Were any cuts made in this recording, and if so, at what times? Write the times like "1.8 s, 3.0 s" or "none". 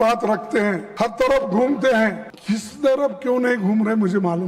0.9 s, 2.3 s